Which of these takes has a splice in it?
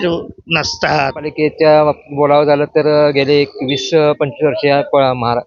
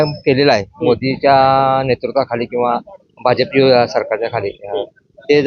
first; 1 cut; at 1.3 s

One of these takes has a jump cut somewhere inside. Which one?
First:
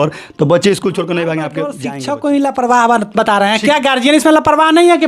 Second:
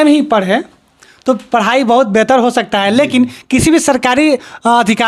first; 1 cut; at 1.8 s

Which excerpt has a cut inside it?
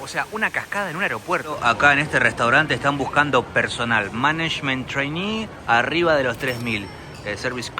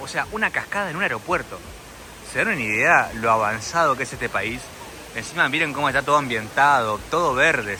first; 1 cut; at 1.6 s

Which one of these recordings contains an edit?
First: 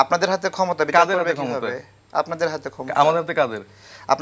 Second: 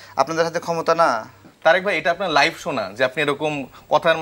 second; 1 cut; at 1.5 s

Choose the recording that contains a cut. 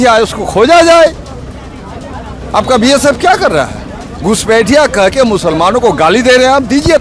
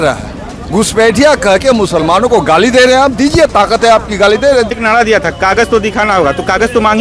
second; 1 cut; at 4.7 s

